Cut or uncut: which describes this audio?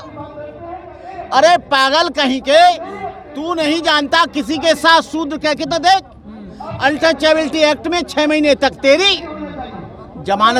uncut